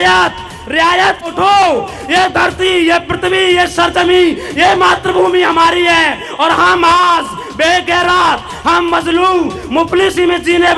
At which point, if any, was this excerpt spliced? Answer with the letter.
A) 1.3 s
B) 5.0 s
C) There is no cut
A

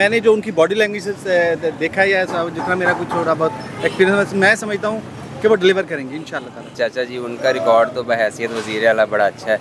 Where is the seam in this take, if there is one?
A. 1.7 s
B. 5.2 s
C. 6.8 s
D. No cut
C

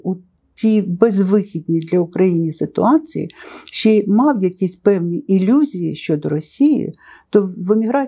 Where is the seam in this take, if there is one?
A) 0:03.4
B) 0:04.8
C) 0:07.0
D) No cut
D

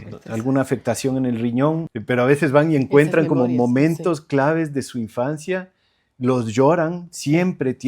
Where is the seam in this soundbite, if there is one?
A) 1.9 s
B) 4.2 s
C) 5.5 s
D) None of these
A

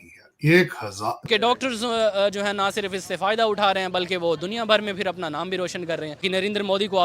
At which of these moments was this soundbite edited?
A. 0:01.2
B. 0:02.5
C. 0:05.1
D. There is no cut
A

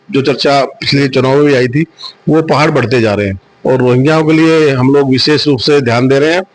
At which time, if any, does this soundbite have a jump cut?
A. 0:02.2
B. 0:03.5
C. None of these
B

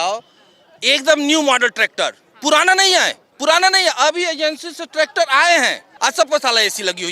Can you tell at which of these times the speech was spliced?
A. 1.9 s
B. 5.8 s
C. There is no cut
B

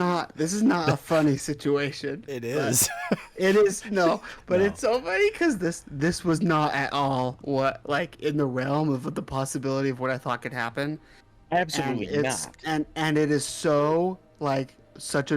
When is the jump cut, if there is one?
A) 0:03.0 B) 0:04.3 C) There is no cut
B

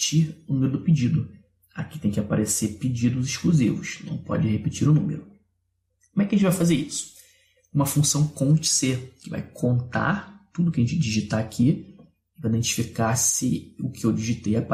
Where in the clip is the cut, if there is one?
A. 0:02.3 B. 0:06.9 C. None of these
C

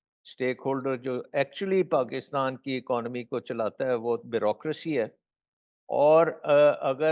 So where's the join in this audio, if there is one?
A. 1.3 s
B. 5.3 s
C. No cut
C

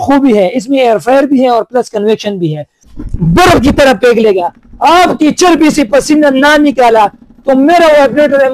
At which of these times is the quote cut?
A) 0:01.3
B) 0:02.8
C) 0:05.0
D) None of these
B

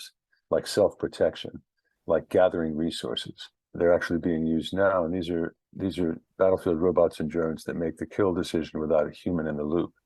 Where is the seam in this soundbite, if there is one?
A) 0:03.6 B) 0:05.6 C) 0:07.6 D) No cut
A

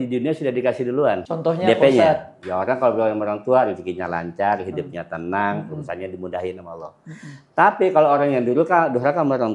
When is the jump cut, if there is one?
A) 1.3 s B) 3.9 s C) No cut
A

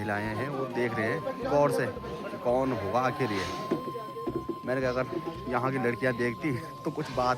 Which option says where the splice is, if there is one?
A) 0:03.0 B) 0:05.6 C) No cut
C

